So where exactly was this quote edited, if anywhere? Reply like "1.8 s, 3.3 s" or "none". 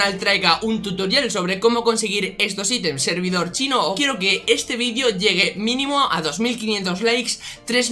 3.0 s, 4.0 s

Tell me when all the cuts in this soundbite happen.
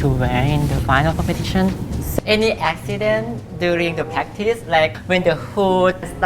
2.1 s

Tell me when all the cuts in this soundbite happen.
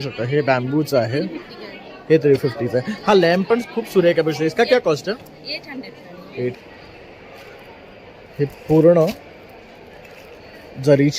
6.6 s

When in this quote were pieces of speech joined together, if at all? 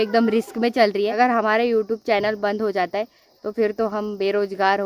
1.1 s

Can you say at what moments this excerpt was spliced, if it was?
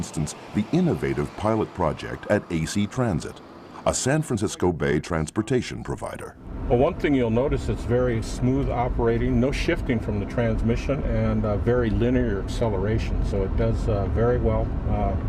none

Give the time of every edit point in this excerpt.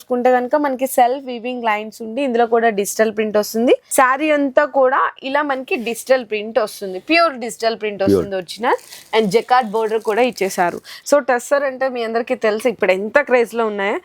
3.9 s, 10.9 s

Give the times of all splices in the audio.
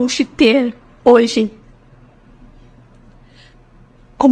none

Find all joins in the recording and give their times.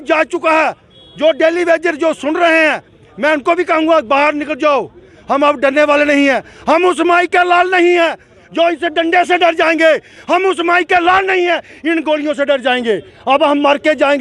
none

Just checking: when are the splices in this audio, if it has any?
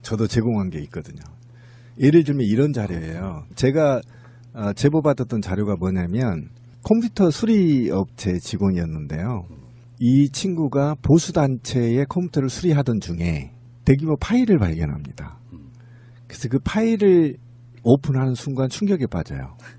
none

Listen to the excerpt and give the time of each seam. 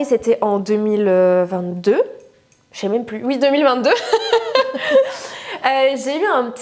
none

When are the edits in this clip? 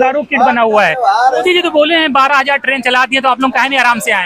1.4 s

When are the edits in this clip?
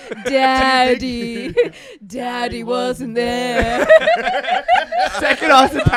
none

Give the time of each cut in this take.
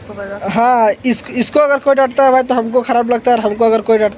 none

